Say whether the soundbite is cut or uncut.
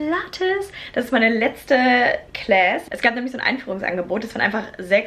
uncut